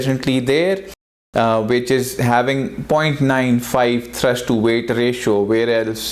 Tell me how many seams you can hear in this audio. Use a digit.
0